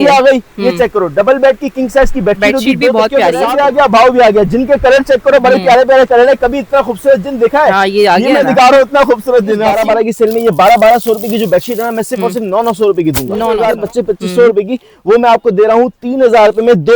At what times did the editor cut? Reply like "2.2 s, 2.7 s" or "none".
3.5 s, 9.7 s, 13.6 s